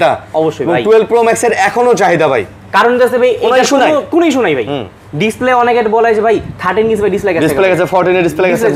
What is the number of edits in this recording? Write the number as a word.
zero